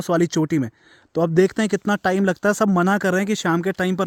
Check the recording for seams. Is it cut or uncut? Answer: uncut